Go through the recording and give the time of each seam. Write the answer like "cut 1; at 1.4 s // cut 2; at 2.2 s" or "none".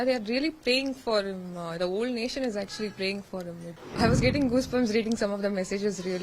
cut 1; at 3.7 s